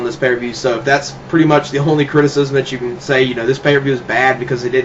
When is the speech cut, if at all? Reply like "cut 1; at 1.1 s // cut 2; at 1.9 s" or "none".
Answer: cut 1; at 1.7 s